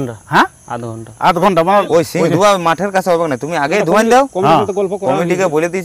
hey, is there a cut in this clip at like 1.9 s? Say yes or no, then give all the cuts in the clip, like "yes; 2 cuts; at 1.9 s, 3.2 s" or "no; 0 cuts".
yes; 1 cut; at 1.9 s